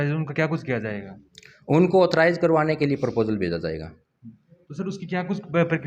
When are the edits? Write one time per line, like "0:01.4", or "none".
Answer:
none